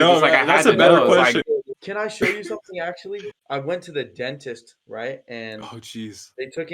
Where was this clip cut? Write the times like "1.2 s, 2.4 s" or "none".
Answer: 1.7 s, 3.3 s